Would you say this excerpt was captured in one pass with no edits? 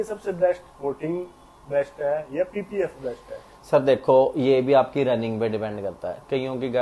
yes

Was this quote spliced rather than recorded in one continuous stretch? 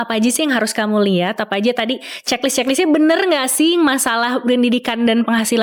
no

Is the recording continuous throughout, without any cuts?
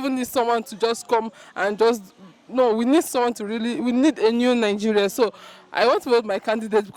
yes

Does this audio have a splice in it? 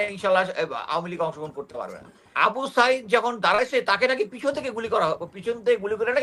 yes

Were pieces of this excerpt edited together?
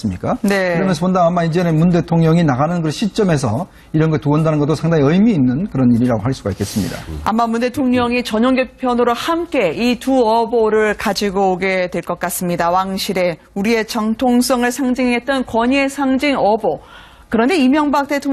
yes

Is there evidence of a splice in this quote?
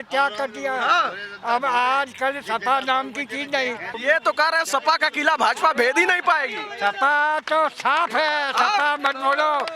yes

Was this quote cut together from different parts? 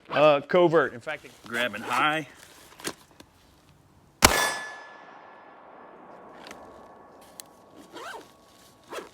yes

